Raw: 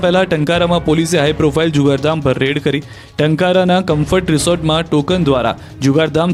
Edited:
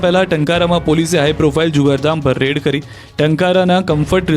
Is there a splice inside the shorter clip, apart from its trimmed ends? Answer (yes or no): no